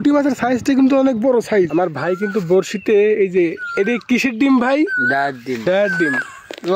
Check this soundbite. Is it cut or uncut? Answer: cut